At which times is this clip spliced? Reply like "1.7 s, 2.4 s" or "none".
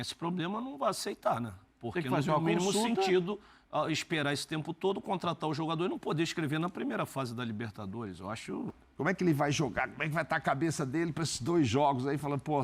8.7 s